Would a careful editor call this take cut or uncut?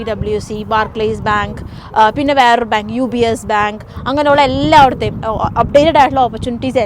uncut